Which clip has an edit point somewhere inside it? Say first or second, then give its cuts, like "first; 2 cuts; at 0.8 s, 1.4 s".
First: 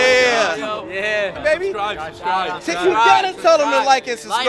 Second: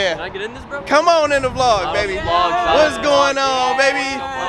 first; 1 cut; at 1.4 s